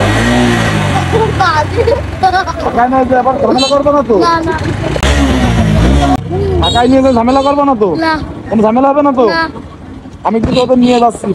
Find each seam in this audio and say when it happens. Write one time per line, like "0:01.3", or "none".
0:05.0
0:06.2